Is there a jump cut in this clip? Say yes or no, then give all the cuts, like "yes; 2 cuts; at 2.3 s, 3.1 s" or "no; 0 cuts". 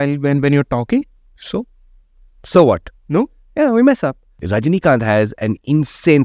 yes; 1 cut; at 4.4 s